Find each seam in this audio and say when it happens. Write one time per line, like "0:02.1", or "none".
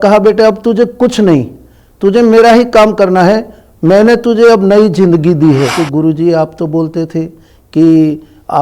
0:05.8